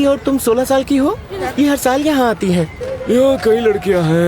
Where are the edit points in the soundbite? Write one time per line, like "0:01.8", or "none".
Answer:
0:01.3
0:02.9